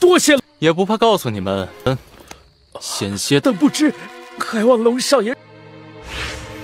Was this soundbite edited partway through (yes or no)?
no